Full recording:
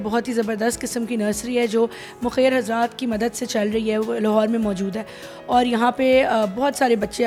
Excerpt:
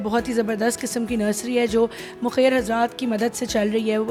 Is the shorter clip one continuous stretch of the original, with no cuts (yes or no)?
yes